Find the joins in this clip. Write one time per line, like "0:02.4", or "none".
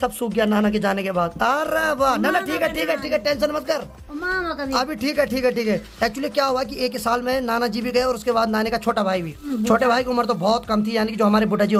none

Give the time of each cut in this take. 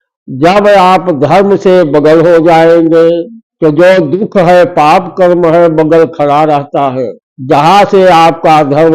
none

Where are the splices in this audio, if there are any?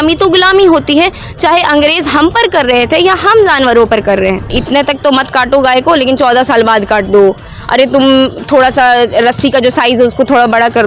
0:04.5

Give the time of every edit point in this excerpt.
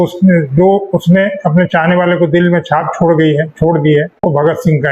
none

